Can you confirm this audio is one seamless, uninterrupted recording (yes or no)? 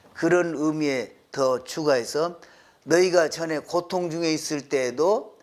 yes